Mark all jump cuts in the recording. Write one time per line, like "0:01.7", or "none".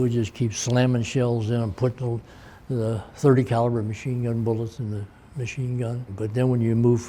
0:06.1